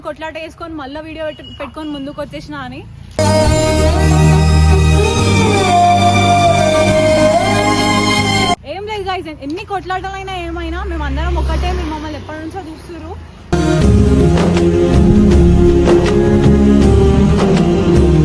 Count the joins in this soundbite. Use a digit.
0